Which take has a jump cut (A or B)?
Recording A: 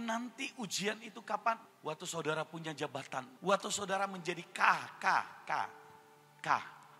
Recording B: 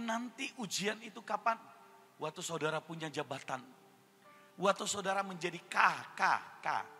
A